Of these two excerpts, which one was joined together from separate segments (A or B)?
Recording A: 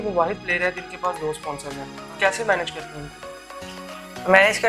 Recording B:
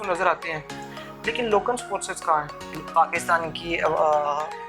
B